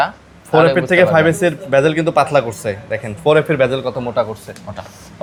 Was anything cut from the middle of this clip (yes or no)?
no